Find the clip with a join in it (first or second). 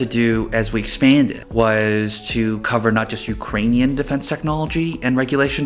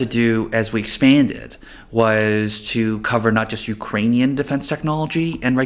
first